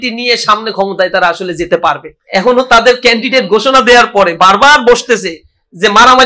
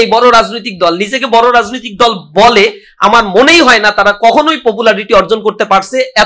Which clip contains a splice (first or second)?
first